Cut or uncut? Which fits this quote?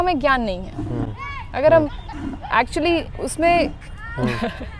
uncut